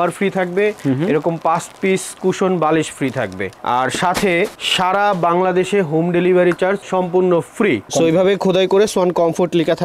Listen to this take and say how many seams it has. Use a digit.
1